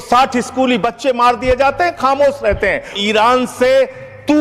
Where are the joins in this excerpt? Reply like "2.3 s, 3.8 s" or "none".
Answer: 3.0 s